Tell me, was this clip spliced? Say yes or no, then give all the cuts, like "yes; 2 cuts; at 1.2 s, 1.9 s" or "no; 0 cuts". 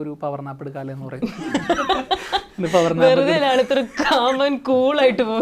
no; 0 cuts